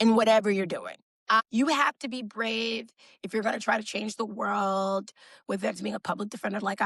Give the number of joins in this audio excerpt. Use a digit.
0